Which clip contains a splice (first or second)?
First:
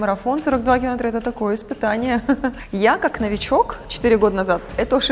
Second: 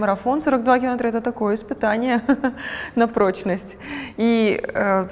first